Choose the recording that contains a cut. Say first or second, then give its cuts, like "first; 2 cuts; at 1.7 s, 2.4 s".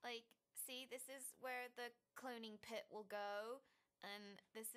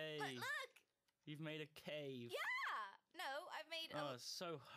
second; 1 cut; at 1.3 s